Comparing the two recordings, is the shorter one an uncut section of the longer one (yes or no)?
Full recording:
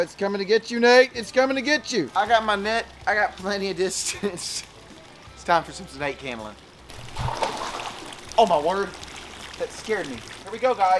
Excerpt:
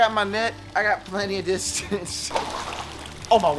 no